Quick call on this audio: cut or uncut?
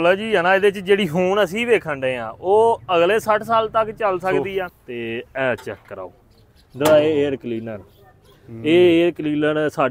cut